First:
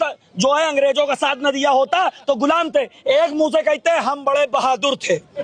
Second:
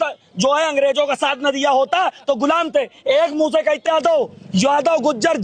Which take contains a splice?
second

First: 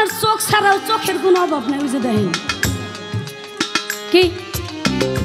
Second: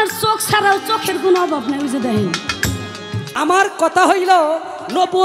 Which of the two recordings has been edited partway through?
second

